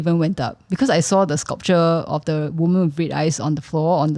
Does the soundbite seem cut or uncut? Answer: uncut